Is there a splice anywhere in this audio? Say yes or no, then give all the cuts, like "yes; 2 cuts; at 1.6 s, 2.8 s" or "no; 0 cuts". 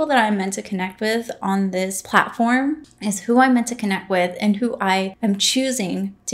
yes; 3 cuts; at 2.0 s, 2.9 s, 5.1 s